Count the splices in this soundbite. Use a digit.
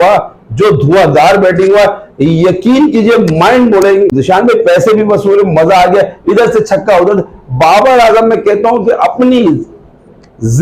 0